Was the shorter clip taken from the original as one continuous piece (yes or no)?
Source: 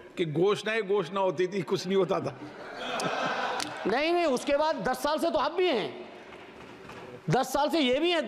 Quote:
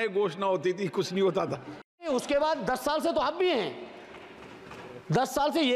no